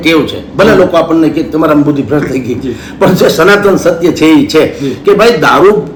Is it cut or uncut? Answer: uncut